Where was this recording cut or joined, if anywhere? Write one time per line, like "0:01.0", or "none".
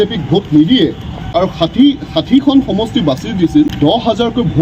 0:01.3
0:03.7